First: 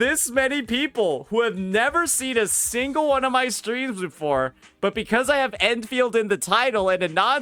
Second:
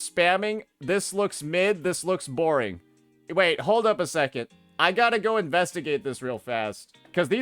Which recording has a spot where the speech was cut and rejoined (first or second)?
second